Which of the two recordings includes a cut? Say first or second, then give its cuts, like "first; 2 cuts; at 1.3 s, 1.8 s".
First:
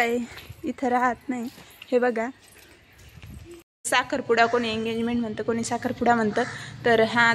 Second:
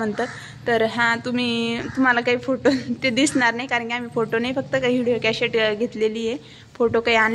first; 1 cut; at 3.9 s